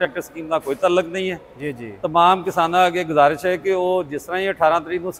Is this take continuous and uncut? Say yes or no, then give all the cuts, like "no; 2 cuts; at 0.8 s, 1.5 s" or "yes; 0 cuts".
yes; 0 cuts